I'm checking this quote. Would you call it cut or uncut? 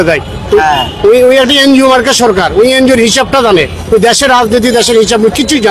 uncut